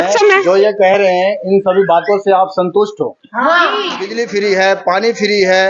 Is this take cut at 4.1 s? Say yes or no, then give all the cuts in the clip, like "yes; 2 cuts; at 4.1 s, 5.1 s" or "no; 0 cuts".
yes; 1 cut; at 4.1 s